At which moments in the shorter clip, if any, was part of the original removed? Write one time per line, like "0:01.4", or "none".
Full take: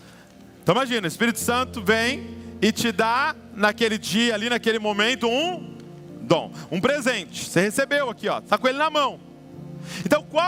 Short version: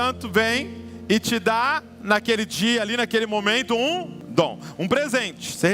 0:04.2